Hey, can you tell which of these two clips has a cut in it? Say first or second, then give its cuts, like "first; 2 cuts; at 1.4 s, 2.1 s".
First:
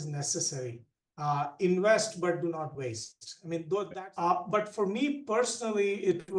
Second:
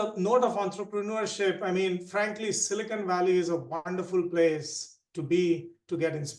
first; 1 cut; at 3.9 s